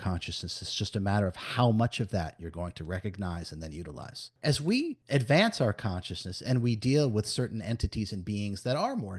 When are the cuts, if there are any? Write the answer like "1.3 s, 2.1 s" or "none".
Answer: 4.3 s, 5.0 s